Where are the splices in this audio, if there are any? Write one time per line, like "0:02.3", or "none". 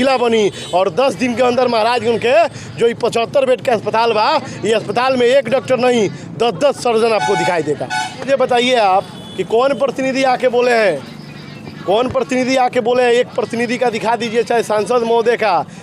0:08.2